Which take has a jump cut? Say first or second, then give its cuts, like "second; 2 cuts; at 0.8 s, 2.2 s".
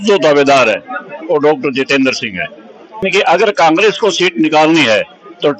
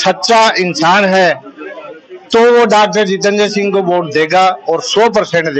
first; 1 cut; at 3.0 s